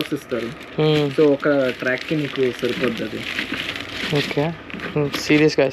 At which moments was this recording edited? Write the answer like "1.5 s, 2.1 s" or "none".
none